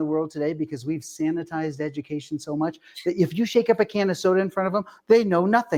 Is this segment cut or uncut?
uncut